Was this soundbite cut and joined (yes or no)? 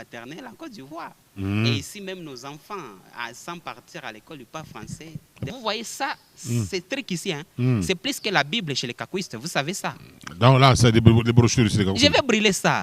yes